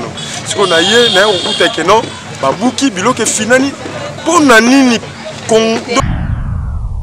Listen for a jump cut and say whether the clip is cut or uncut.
cut